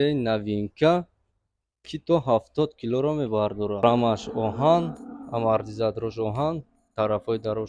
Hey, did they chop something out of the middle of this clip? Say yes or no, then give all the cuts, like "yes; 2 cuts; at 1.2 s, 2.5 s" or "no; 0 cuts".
yes; 1 cut; at 3.8 s